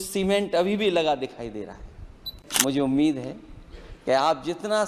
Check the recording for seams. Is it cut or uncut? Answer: cut